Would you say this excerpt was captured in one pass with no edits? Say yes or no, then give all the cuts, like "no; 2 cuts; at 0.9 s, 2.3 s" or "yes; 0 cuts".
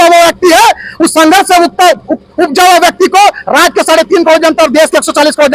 yes; 0 cuts